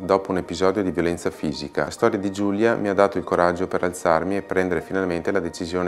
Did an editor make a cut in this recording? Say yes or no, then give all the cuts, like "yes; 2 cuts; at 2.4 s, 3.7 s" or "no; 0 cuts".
yes; 1 cut; at 1.9 s